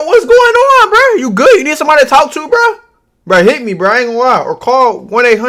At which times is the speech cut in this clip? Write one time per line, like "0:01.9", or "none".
none